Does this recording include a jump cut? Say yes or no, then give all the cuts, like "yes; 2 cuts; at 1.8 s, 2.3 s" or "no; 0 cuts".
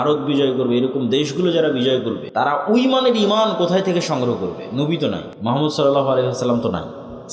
yes; 2 cuts; at 2.2 s, 5.3 s